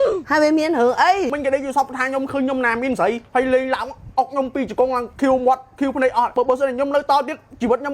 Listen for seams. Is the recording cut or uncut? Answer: cut